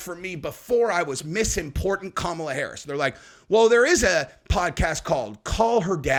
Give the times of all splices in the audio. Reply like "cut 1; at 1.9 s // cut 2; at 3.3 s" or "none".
none